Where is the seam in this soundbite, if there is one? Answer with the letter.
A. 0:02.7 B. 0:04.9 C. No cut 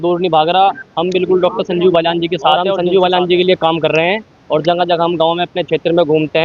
A